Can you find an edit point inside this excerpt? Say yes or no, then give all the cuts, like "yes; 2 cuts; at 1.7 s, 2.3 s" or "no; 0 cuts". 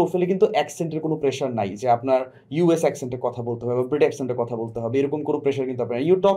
no; 0 cuts